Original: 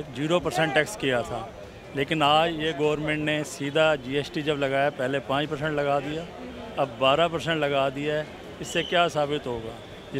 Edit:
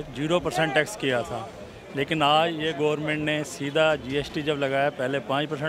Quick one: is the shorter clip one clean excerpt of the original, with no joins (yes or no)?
yes